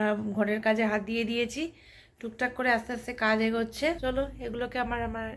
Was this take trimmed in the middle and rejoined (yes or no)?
yes